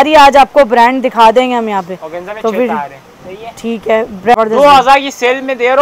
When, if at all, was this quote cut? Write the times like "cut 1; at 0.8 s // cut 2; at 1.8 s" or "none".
cut 1; at 4.3 s